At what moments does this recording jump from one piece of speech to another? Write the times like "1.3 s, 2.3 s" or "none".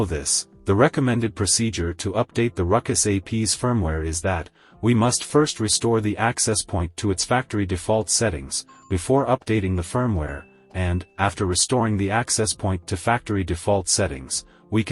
none